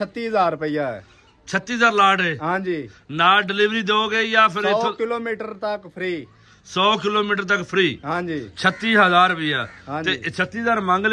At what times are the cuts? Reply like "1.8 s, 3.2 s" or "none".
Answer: none